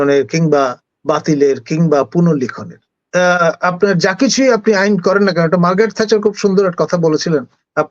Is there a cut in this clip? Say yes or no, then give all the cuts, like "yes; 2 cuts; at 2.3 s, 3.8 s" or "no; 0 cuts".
yes; 1 cut; at 3.0 s